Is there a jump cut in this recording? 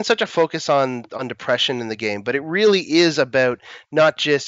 no; 0 cuts

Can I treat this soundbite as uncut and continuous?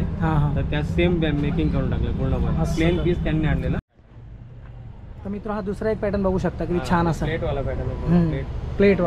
no; 1 cut; at 3.8 s

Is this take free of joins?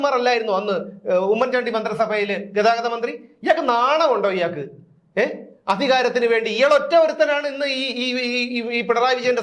yes; 0 cuts

